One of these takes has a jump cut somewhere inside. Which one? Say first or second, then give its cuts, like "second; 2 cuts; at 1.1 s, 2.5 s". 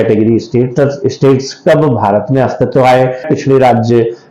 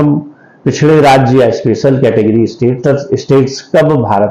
first; 1 cut; at 3.3 s